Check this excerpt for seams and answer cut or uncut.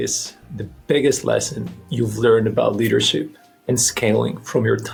uncut